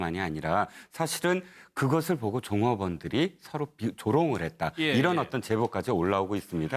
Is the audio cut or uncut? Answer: cut